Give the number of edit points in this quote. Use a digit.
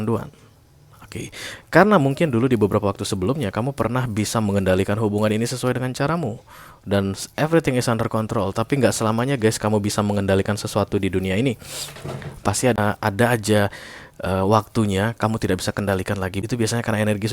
2